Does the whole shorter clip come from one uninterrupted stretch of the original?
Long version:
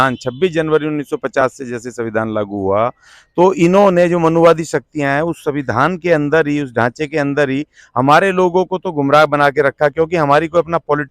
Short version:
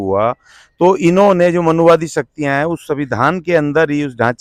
yes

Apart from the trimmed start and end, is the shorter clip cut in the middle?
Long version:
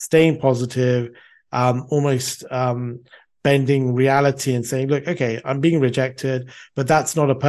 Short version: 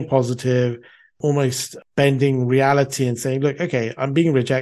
yes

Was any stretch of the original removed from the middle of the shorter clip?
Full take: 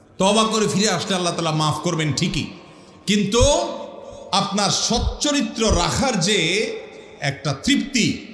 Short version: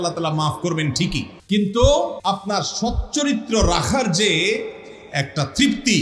yes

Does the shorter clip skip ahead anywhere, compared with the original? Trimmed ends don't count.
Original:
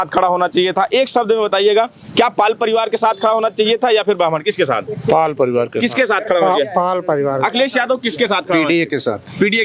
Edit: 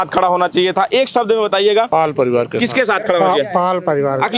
yes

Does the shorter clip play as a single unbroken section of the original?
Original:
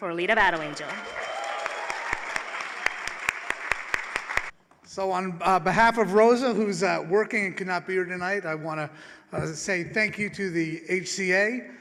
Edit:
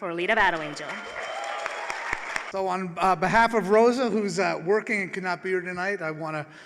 no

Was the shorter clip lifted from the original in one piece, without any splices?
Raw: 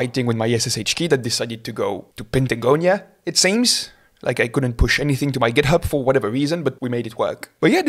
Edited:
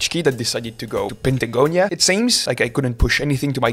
no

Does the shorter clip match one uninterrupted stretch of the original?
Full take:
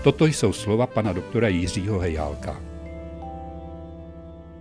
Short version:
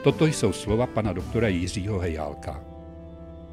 no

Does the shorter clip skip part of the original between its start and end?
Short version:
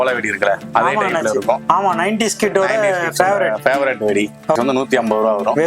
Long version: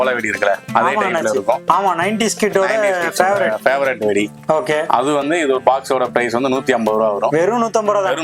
yes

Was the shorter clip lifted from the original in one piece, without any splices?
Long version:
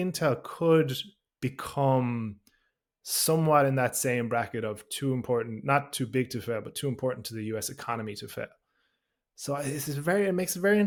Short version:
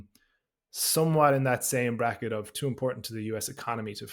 no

